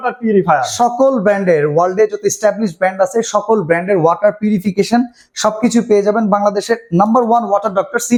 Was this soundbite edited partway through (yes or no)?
no